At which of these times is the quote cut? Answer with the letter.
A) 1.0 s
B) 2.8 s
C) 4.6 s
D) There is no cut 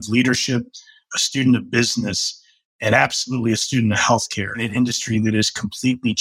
C